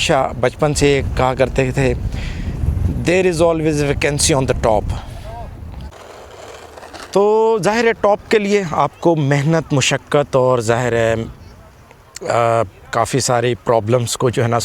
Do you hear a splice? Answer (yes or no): no